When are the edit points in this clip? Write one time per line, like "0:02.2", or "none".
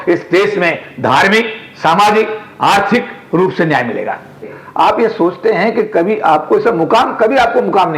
0:04.6